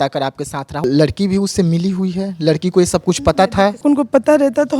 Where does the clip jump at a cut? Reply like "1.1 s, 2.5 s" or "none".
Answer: 0.8 s, 3.8 s